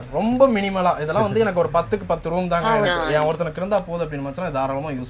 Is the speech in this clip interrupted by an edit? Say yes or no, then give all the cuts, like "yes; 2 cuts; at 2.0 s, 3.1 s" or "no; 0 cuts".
no; 0 cuts